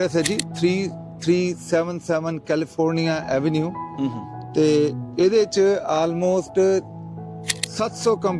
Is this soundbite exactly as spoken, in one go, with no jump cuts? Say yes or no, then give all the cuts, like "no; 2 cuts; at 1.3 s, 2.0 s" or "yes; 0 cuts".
yes; 0 cuts